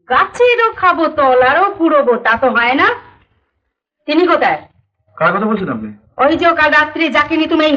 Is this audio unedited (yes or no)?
yes